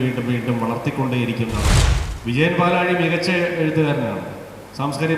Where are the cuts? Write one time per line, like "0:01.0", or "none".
0:01.7